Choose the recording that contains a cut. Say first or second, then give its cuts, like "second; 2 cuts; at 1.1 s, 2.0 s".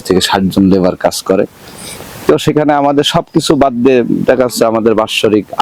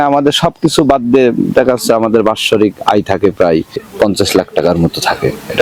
second; 1 cut; at 3.9 s